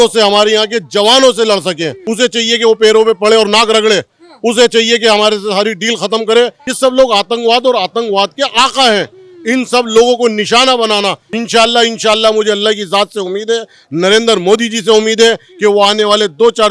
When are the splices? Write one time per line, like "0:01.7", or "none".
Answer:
0:02.0
0:06.6
0:11.3